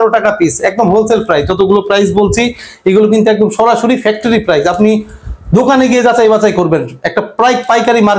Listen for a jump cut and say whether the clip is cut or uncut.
uncut